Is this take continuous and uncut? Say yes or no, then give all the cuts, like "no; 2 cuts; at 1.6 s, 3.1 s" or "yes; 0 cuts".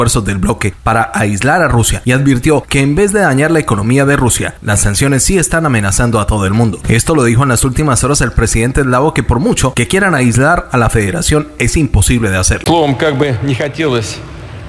yes; 0 cuts